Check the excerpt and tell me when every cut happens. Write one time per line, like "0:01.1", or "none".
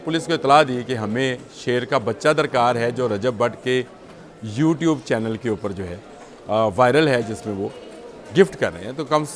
none